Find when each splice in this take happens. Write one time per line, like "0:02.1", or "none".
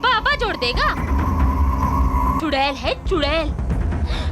0:02.4